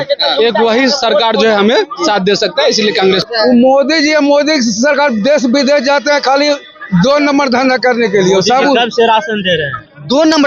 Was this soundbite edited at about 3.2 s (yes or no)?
yes